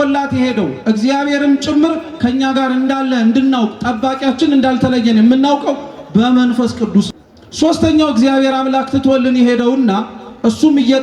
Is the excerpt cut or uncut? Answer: cut